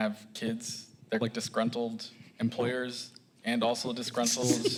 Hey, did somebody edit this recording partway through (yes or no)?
no